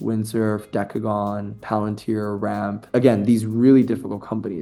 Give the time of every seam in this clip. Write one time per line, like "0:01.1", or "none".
none